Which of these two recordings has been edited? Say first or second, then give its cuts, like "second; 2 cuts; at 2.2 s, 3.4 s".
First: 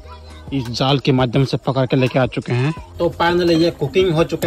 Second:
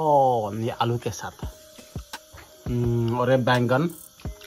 first; 1 cut; at 2.8 s